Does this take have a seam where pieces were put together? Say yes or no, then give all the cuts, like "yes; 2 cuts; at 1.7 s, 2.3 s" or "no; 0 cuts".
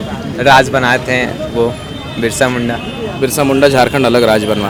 no; 0 cuts